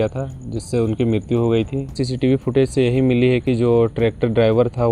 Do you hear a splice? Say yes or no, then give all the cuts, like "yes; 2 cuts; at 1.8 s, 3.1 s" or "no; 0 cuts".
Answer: yes; 1 cut; at 2.0 s